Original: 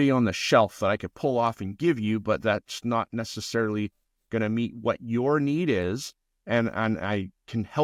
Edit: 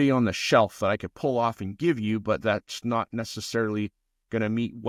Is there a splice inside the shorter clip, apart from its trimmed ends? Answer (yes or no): no